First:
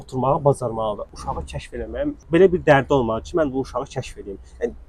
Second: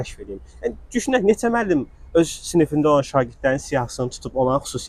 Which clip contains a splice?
first; 1 cut; at 1.1 s

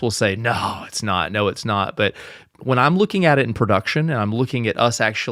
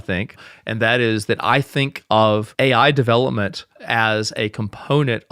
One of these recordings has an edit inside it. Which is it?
second; 1 cut; at 2.5 s

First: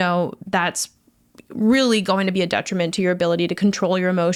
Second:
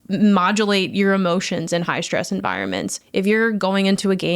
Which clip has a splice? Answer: second; 1 cut; at 3.0 s

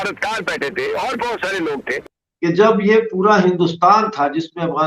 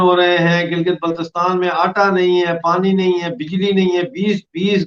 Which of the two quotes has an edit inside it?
first; 1 cut; at 2.1 s

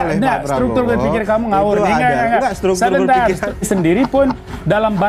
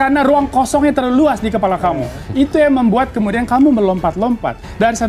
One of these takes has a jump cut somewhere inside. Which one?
first; 1 cut; at 3.5 s

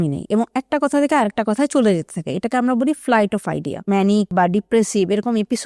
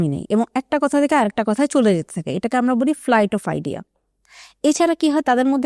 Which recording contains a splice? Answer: first; 1 cut; at 4.2 s

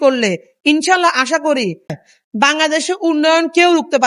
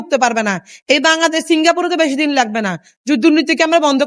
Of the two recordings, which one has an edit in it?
first; 1 cut; at 2.0 s

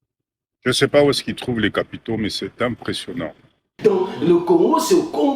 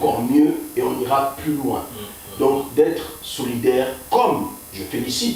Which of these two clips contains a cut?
first; 1 cut; at 3.7 s

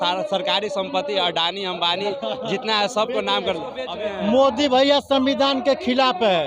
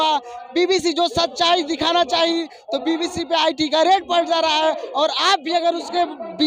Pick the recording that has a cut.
first; 1 cut; at 3.9 s

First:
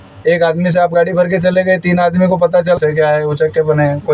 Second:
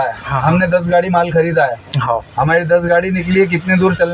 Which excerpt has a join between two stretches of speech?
first; 1 cut; at 2.8 s

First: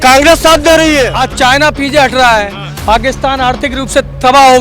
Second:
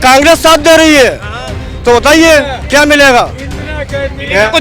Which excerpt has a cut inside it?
first; 1 cut; at 1.2 s

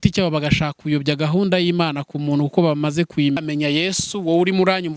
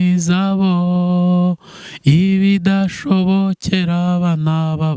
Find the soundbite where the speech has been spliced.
first; 1 cut; at 3.4 s

